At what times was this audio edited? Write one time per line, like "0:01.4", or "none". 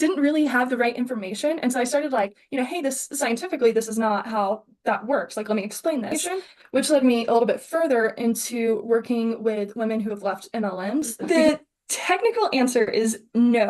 0:06.2
0:11.1